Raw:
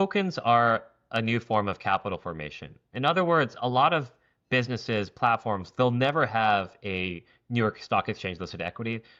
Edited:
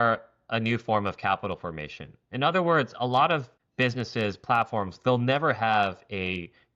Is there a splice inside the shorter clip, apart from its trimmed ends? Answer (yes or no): yes